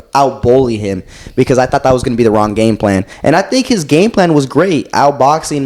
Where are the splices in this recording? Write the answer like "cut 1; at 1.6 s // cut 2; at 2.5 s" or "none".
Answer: cut 1; at 3.1 s

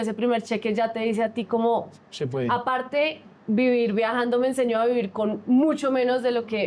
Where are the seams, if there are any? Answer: none

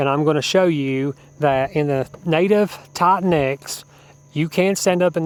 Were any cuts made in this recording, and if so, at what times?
none

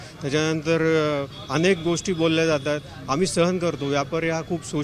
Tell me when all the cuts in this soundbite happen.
none

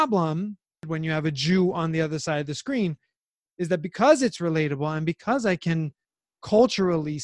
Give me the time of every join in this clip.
cut 1; at 0.9 s

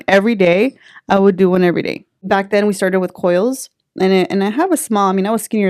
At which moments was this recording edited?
cut 1; at 2.2 s

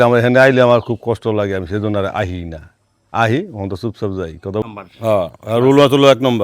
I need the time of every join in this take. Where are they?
cut 1; at 4.6 s

